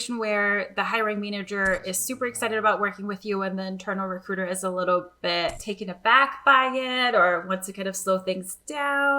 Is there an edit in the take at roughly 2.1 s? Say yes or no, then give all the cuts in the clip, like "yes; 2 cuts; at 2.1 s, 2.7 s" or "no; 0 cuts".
no; 1 cut; at 5.6 s